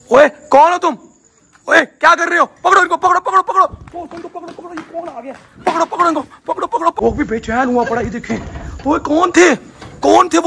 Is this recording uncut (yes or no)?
no